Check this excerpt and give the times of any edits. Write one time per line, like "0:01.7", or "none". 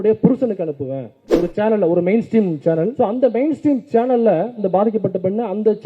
0:01.2
0:02.9
0:04.6